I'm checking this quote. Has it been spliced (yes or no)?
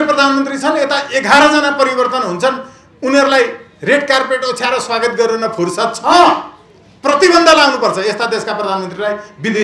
no